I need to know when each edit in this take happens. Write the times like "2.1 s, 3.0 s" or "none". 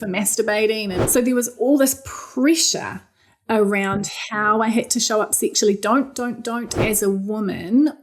0.9 s, 6.8 s